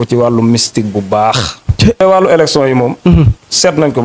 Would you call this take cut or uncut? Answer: cut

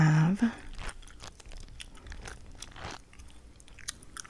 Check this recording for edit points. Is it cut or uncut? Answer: uncut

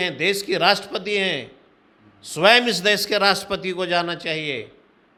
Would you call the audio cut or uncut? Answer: uncut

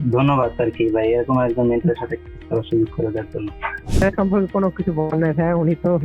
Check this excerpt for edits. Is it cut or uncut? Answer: cut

